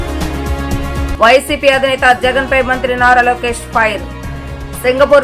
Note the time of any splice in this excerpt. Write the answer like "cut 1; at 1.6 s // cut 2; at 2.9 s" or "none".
cut 1; at 1.1 s

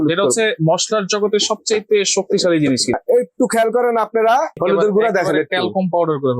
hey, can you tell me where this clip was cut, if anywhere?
cut 1; at 2.9 s // cut 2; at 4.5 s

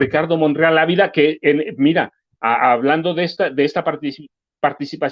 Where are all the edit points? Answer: none

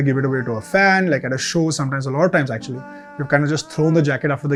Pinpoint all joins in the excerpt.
none

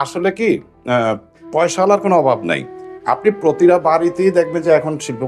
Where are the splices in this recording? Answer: none

